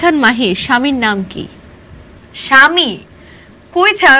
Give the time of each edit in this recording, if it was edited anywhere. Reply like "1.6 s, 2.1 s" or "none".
none